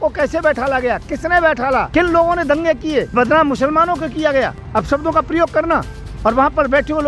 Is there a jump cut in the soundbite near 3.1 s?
yes; 3 cuts; at 1.9 s, 3.1 s, 4.6 s

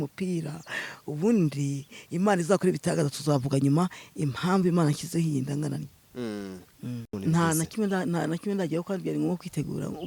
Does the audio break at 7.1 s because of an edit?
yes; 1 cut; at 7.1 s

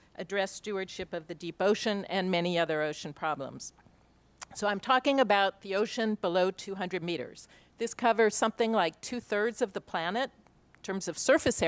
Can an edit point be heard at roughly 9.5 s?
yes; 1 cut; at 9.5 s

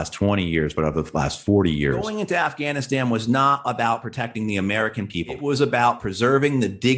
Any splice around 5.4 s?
yes; 2 cuts; at 2.1 s, 5.4 s

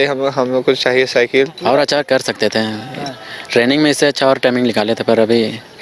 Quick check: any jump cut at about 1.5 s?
yes; 1 cut; at 1.5 s

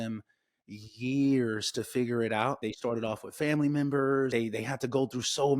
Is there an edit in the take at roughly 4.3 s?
yes; 2 cuts; at 2.7 s, 4.3 s

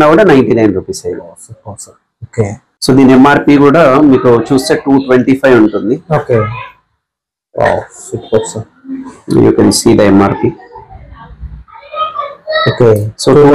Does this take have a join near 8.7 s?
no; 1 cut; at 2.7 s

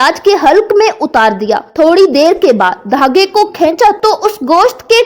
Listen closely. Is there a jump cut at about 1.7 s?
yes; 1 cut; at 1.7 s

